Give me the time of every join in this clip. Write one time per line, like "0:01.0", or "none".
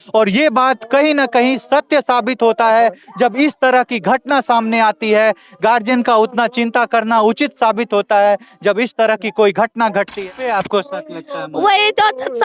0:10.2